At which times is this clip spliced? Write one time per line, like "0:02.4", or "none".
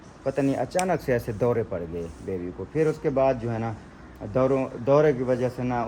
none